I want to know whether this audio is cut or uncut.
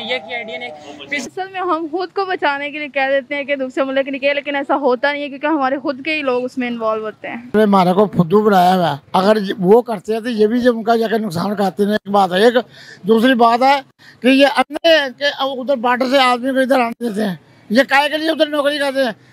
cut